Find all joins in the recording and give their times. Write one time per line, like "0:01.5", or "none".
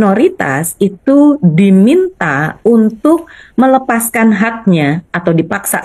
none